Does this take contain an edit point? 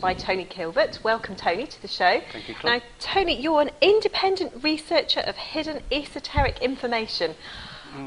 no; 0 cuts

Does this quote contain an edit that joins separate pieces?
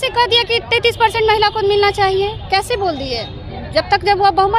no; 0 cuts

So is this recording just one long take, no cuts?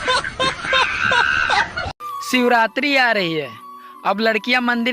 no; 1 cut; at 1.8 s

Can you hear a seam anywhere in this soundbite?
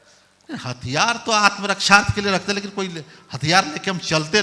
no; 0 cuts

